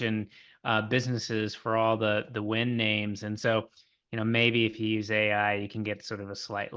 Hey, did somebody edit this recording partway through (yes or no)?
no